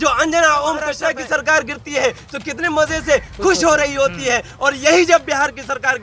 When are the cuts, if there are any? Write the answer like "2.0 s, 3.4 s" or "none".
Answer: 0.9 s